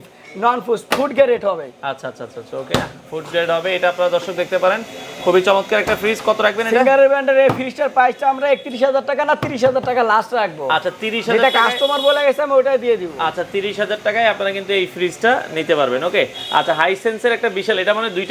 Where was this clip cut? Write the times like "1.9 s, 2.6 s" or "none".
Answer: none